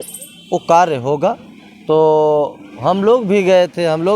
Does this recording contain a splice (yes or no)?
no